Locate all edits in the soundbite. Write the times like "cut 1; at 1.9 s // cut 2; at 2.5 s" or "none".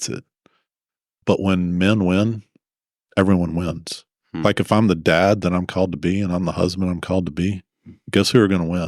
cut 1; at 1.2 s